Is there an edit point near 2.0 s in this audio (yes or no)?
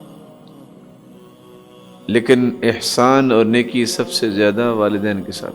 yes